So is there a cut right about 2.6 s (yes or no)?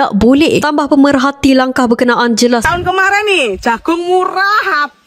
yes